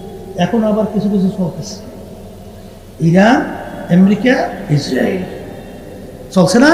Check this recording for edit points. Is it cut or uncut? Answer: uncut